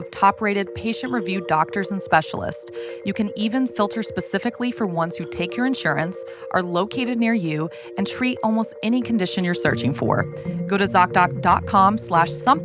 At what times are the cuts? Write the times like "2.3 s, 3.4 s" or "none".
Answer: 10.5 s